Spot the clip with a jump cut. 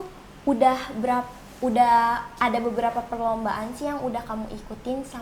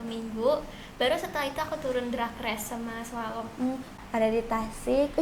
second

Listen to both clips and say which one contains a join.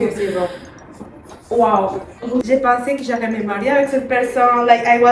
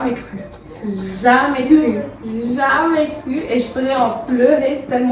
first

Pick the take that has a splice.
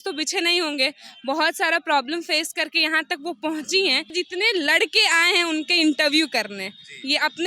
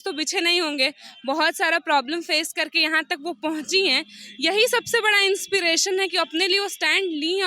first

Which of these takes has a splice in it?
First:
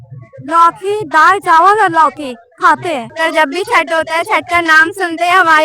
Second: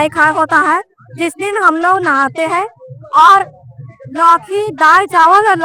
first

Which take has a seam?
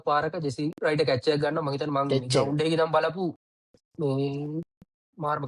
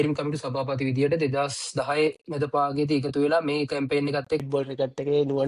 second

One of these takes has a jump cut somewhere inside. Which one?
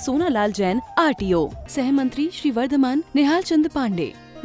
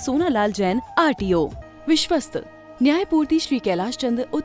second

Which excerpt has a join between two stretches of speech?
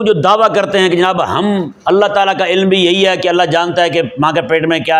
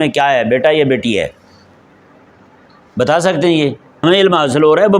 second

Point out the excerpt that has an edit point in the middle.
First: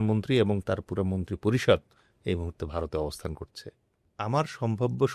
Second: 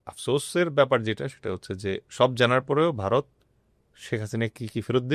first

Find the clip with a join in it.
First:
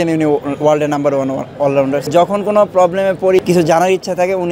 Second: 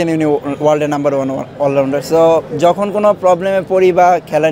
first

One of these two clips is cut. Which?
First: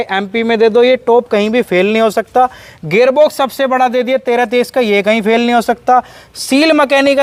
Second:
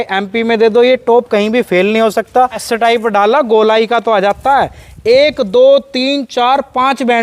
second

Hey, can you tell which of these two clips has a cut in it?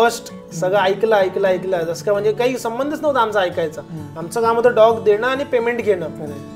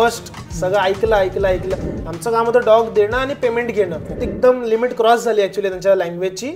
second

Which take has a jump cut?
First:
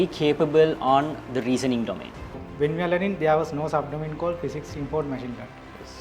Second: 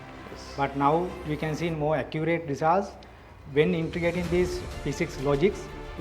first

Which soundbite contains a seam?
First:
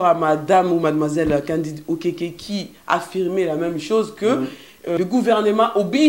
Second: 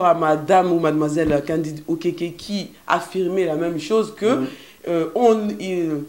first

